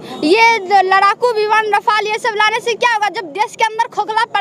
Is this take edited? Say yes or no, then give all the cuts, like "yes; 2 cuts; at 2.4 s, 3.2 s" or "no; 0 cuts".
no; 0 cuts